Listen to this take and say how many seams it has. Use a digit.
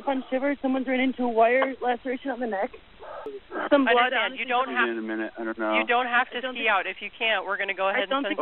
1